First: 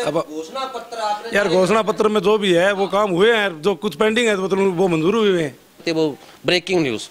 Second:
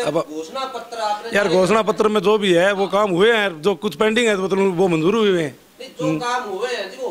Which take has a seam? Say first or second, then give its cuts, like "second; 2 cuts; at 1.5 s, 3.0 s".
first; 1 cut; at 5.8 s